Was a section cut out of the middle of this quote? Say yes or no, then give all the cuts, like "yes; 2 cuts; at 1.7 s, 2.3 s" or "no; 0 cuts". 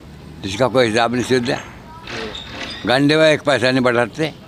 no; 0 cuts